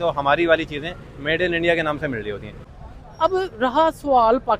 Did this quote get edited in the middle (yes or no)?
yes